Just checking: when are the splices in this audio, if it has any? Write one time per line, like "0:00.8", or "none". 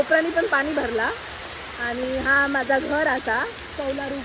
none